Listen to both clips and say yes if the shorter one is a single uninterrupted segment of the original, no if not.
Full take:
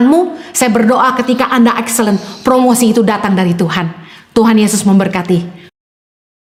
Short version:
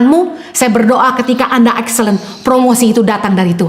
yes